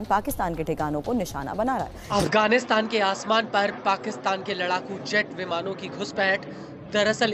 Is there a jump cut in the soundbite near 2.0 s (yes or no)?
yes